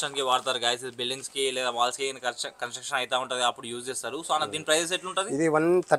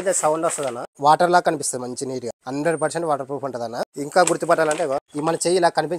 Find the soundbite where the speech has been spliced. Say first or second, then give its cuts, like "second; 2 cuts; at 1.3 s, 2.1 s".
second; 4 cuts; at 0.9 s, 2.4 s, 3.9 s, 5.1 s